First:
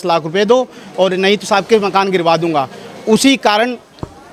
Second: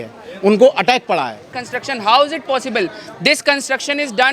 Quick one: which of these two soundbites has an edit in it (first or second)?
second